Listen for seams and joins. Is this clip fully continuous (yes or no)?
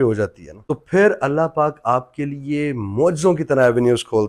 yes